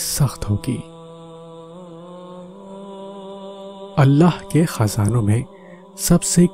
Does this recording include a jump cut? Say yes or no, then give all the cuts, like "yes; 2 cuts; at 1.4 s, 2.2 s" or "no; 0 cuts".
yes; 2 cuts; at 1.0 s, 3.9 s